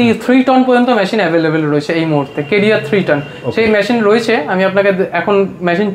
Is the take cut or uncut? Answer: uncut